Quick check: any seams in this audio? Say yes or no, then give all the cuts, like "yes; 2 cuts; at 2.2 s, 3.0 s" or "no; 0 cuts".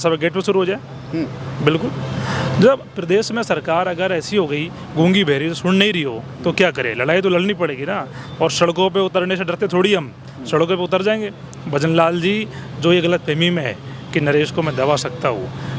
no; 0 cuts